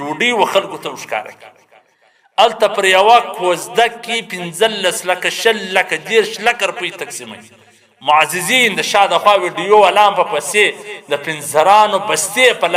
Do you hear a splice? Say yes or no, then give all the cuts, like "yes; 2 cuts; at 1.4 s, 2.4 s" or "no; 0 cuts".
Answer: no; 0 cuts